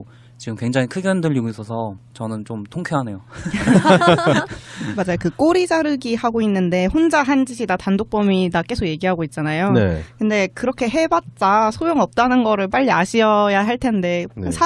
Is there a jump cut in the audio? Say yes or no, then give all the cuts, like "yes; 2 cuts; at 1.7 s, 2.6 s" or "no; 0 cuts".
no; 0 cuts